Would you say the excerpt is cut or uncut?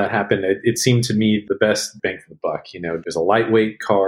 cut